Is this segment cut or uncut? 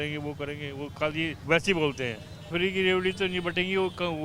cut